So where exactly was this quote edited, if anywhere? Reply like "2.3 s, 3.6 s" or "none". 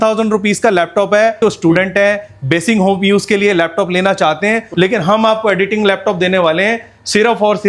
1.4 s, 4.7 s